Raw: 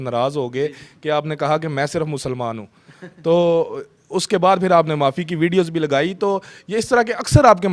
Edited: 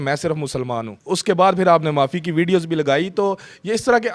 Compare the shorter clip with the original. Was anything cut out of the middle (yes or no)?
yes